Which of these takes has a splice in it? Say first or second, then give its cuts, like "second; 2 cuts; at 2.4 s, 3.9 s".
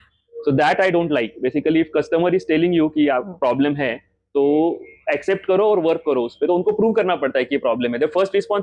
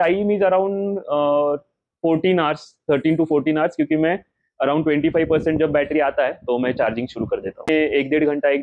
second; 1 cut; at 7.7 s